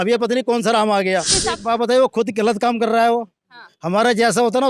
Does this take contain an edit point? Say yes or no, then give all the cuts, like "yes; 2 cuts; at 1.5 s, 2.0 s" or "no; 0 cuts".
yes; 1 cut; at 1.3 s